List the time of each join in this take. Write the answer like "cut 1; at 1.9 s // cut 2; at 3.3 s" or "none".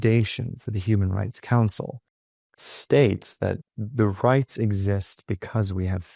cut 1; at 2.1 s // cut 2; at 3.7 s